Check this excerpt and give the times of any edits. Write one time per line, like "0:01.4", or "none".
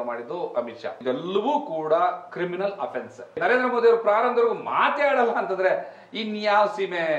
0:01.0
0:03.4